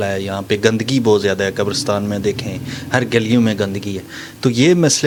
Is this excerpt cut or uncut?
uncut